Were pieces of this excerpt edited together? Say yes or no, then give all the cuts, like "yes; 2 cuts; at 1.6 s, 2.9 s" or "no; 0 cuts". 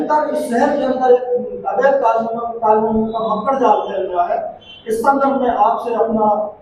no; 0 cuts